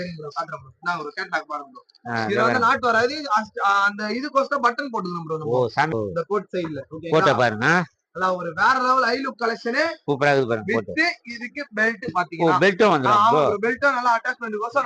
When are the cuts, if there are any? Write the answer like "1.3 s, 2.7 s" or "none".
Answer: 5.9 s